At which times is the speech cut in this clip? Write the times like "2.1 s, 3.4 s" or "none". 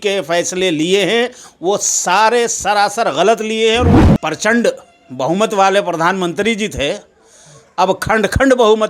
4.0 s